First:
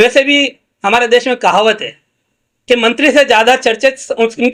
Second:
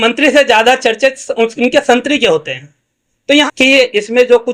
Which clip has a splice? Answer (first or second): second